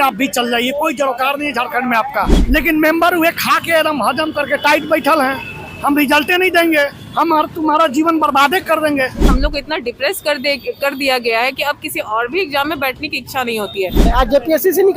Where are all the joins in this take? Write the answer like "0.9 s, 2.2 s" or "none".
2.4 s, 9.3 s, 14.1 s